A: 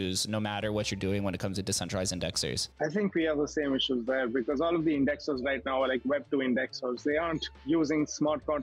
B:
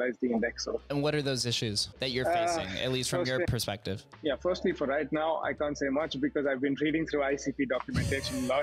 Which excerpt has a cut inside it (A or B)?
B